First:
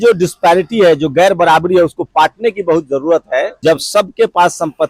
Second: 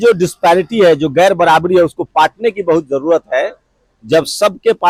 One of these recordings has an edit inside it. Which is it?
first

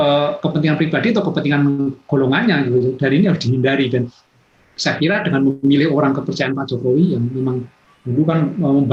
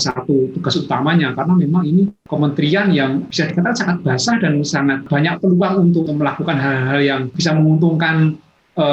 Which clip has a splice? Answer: second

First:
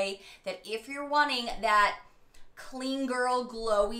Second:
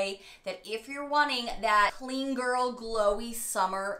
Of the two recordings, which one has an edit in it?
second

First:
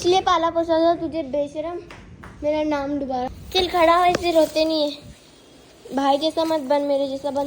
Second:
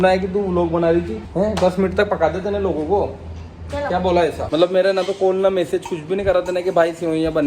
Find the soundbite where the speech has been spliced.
second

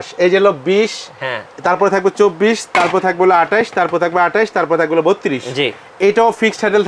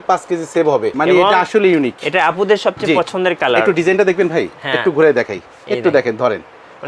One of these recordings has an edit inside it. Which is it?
second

